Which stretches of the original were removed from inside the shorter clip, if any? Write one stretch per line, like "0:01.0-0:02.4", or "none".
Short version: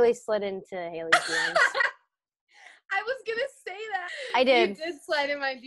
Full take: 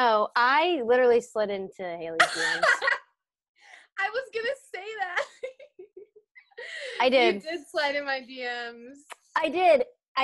0:05.1-0:06.7